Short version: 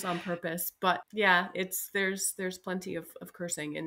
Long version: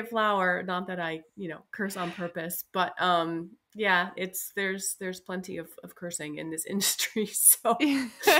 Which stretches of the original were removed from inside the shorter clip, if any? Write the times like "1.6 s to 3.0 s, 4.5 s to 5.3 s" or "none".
2.9 s to 3.6 s